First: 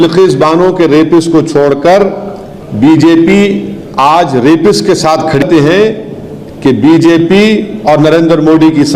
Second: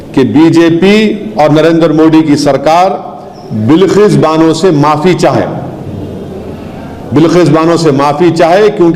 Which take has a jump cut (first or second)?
first